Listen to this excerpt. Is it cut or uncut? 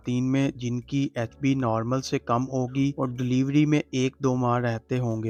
uncut